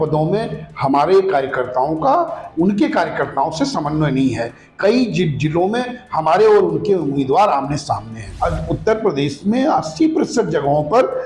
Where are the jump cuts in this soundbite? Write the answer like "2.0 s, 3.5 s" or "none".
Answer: 8.2 s